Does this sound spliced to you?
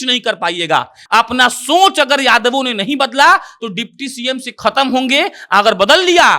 yes; 1 cut; at 1.0 s

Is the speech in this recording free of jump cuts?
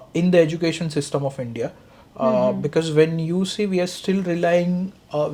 yes; 0 cuts

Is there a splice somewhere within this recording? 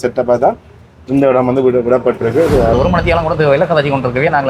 yes; 1 cut; at 2.7 s

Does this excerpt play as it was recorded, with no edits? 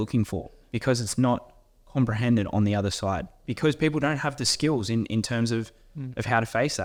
yes; 0 cuts

